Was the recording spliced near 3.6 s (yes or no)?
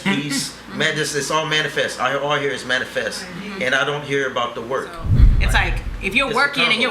no